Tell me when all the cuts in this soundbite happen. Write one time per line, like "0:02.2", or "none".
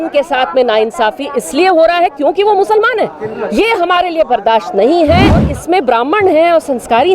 0:05.5